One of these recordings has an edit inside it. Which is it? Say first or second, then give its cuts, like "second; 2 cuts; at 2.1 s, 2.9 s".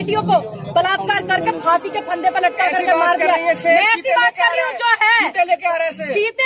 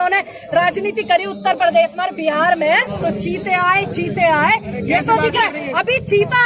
second; 1 cut; at 2.9 s